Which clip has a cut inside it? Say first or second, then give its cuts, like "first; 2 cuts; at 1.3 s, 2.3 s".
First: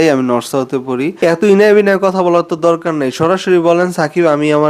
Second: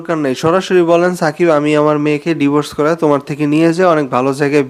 first; 1 cut; at 1.2 s